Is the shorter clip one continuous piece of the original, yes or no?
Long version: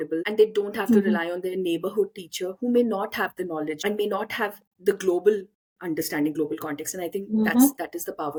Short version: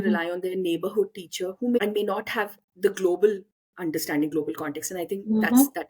no